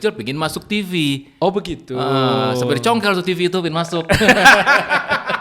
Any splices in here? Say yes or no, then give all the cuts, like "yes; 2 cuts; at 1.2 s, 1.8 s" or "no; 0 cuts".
no; 0 cuts